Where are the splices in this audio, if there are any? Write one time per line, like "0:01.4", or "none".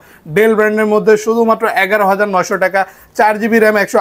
none